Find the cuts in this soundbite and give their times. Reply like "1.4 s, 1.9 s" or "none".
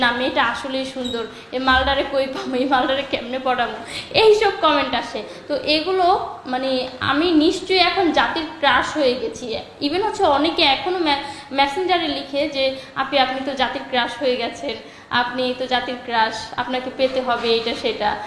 none